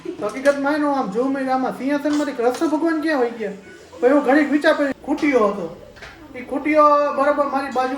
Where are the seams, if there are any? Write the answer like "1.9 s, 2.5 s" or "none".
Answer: 4.9 s